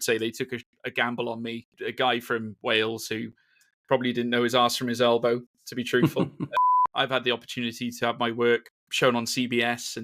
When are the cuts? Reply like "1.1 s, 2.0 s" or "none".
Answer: 1.7 s, 6.5 s, 8.8 s